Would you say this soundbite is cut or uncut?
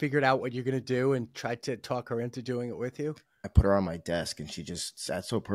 cut